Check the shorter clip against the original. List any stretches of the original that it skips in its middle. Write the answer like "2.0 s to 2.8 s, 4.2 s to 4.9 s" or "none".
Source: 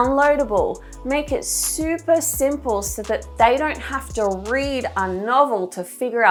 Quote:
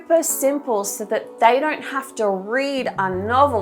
none